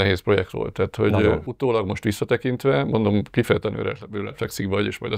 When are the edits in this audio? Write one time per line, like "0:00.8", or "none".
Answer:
0:01.4